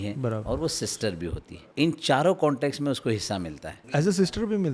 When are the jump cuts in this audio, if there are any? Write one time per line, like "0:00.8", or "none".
0:01.5
0:04.0